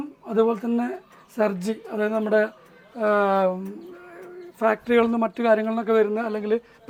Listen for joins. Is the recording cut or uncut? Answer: uncut